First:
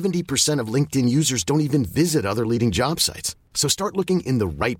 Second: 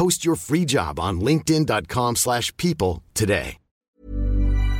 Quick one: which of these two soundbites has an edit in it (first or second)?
second